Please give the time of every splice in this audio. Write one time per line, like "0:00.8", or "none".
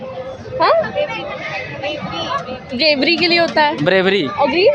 none